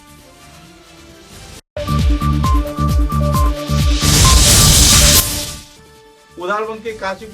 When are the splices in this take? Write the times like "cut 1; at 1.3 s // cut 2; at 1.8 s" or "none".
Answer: cut 1; at 5.2 s